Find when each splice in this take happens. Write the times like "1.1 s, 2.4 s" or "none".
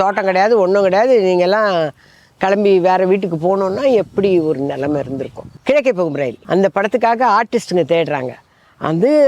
5.5 s, 6.4 s